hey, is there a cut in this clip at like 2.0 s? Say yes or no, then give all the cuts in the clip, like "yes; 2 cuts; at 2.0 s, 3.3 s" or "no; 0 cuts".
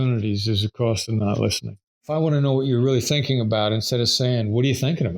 yes; 1 cut; at 2.0 s